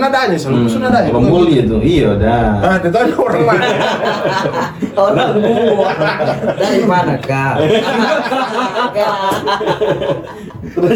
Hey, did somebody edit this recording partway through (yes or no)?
no